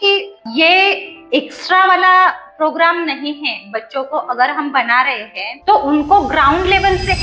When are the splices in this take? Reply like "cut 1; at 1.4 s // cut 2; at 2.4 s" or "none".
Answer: none